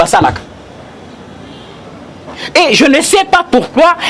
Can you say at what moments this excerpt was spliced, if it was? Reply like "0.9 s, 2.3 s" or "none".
none